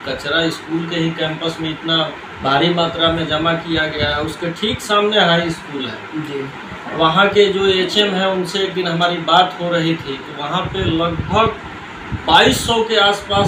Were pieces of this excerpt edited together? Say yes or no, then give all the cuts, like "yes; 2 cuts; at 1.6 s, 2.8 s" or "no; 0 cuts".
no; 0 cuts